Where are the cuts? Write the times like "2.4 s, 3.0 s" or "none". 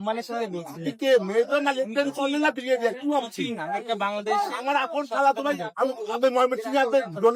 none

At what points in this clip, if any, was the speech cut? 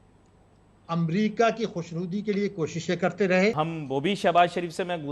3.5 s

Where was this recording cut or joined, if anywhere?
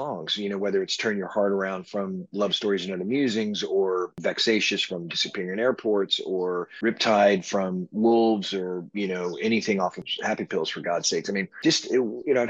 4.1 s, 10.0 s

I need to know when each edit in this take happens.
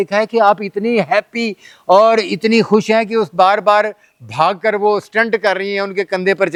none

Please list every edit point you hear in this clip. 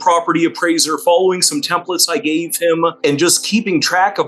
3.0 s

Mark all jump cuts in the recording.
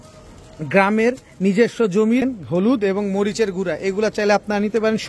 2.2 s

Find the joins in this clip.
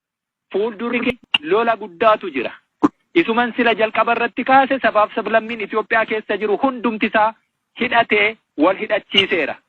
0.9 s

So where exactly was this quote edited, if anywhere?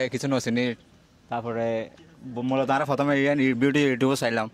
none

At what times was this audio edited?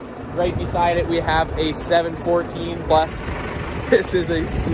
2.8 s

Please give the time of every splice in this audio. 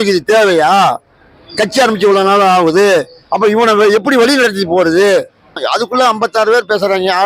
5.6 s

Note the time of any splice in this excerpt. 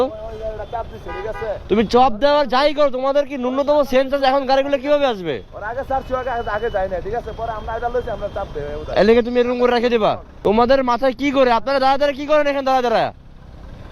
10.3 s

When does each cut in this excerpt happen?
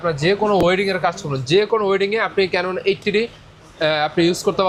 none

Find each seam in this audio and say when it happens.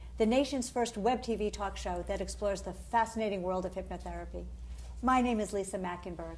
1.2 s

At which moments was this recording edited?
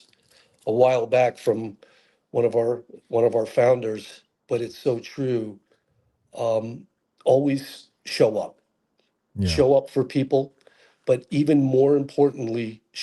none

